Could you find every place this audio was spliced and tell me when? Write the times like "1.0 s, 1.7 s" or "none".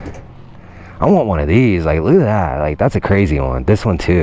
none

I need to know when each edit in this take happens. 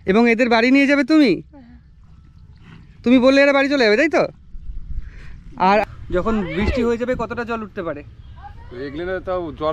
5.8 s

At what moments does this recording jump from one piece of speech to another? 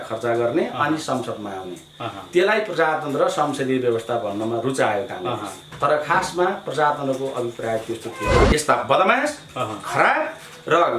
8.4 s

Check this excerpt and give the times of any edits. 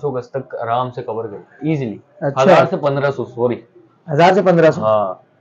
none

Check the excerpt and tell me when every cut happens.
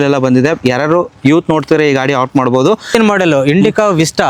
none

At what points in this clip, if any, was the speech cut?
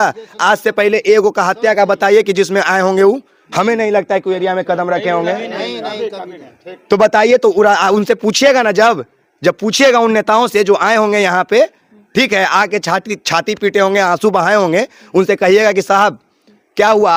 none

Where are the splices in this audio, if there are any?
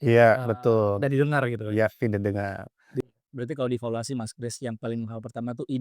3.0 s

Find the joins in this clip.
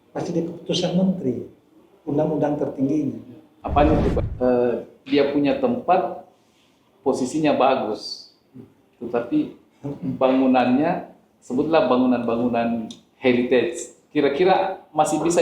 4.2 s

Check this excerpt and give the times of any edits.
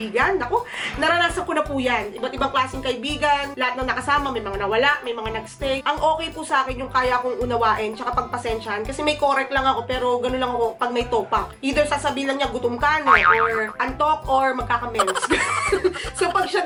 none

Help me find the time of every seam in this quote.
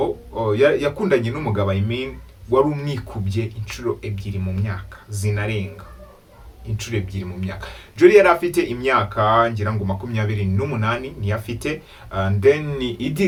none

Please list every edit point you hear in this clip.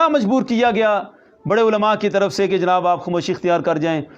none

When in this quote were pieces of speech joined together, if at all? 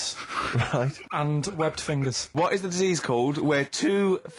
1.0 s, 2.3 s

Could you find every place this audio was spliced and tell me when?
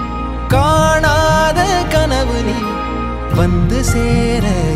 none

